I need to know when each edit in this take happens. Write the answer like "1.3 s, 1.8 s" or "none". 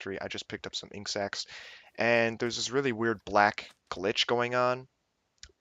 1.4 s